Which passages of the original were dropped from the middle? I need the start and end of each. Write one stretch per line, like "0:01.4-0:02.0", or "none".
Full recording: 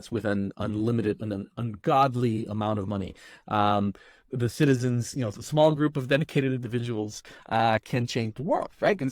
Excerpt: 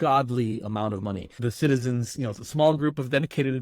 0:03.1-0:04.3